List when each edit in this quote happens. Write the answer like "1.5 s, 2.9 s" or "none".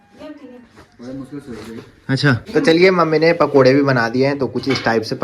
2.4 s